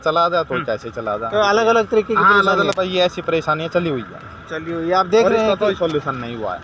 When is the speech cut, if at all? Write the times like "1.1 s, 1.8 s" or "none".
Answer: none